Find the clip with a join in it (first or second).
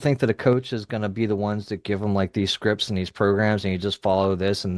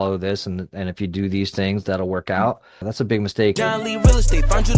second